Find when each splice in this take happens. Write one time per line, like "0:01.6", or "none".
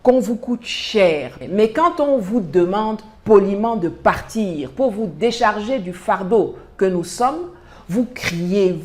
0:01.4